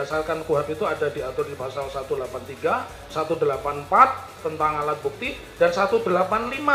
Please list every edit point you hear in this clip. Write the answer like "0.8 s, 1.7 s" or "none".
none